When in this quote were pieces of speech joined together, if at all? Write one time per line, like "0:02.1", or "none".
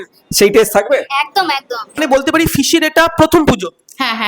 0:02.0